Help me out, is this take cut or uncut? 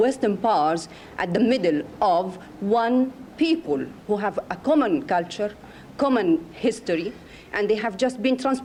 uncut